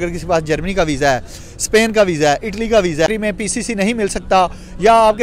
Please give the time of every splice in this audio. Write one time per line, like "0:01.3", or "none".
0:03.0